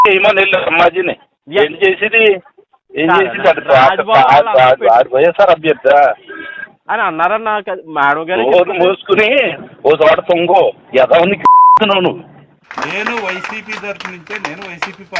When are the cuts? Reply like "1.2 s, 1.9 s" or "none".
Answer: 12.7 s

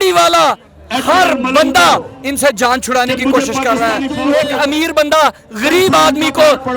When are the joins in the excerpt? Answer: 4.1 s

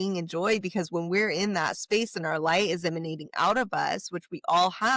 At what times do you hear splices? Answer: none

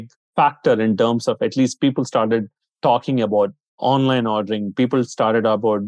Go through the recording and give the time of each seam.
none

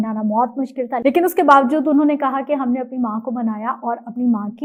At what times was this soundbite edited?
none

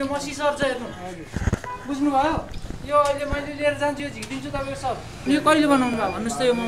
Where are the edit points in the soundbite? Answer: 5.1 s

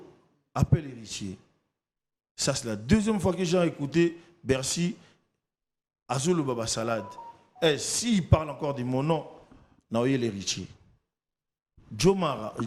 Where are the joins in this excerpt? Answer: none

